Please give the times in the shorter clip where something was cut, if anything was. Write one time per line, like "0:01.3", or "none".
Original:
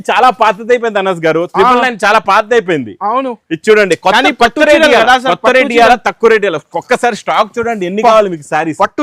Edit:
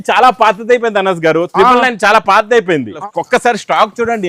0:03.0